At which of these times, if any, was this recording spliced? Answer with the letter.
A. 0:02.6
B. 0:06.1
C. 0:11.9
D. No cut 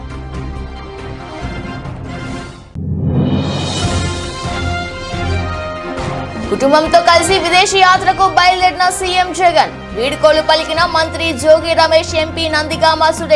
A